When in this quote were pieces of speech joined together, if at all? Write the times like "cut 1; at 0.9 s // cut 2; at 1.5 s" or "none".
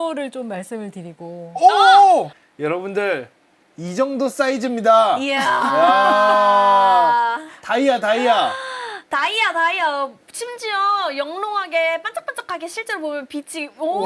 none